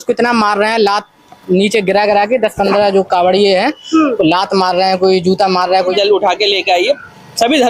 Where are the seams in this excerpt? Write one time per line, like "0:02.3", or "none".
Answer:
0:05.9

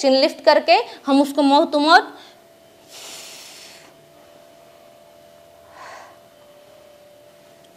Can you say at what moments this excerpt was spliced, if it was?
none

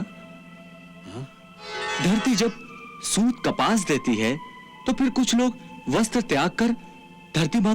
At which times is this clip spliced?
0:01.7

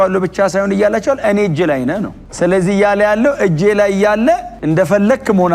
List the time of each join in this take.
0:02.3

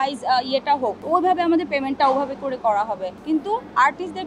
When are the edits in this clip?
0:01.0
0:03.2

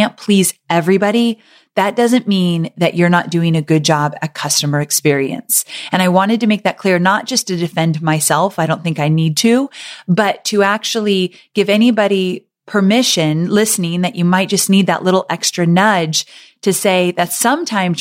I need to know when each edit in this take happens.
none

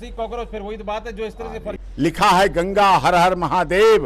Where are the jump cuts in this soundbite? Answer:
0:01.8

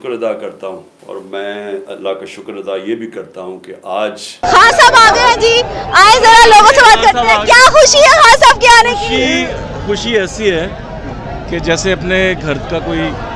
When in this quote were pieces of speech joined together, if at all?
0:00.9
0:04.3

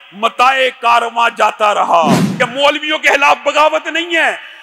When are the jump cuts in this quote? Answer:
0:02.3

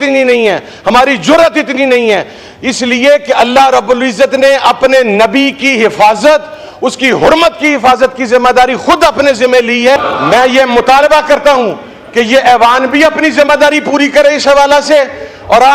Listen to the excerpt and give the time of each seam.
0:10.0

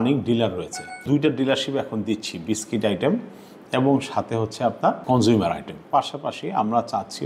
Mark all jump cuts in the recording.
0:01.0
0:05.0
0:05.8

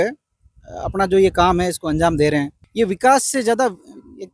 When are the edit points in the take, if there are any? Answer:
0:02.6

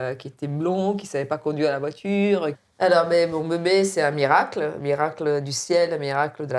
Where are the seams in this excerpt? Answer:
0:02.6

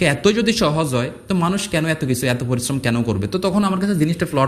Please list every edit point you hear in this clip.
none

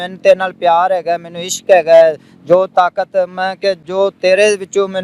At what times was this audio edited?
none

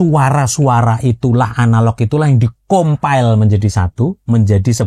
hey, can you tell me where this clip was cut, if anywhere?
none

